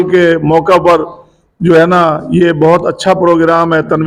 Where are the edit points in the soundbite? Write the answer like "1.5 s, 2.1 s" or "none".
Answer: none